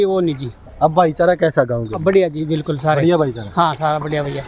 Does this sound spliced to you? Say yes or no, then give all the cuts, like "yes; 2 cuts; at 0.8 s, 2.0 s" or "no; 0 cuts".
no; 0 cuts